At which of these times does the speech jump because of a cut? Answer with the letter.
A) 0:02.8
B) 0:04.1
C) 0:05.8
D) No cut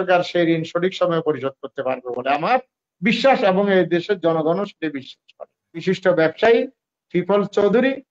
C